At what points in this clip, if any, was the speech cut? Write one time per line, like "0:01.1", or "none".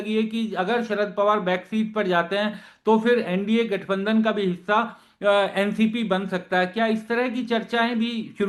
none